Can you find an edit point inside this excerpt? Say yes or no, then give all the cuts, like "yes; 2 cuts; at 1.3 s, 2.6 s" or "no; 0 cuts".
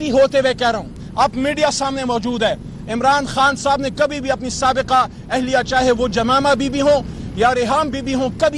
no; 0 cuts